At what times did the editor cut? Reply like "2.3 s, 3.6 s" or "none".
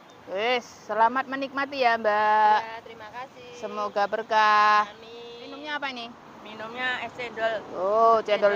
5.5 s